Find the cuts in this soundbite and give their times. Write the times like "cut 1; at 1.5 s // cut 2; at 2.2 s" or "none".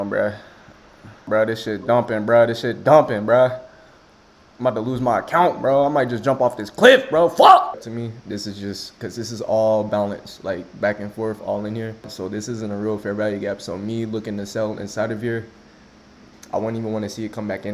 cut 1; at 1.2 s // cut 2; at 7.8 s // cut 3; at 12.1 s